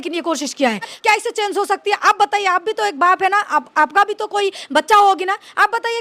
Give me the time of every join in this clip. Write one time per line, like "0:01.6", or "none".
0:00.9